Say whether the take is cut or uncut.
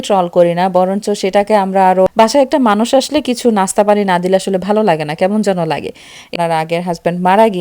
cut